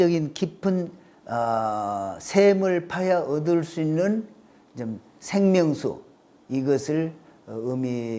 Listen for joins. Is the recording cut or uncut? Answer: uncut